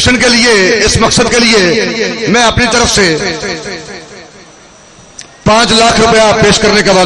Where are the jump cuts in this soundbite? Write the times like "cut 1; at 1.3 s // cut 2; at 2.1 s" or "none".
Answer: none